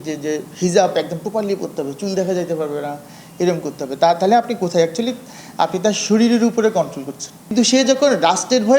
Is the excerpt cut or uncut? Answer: cut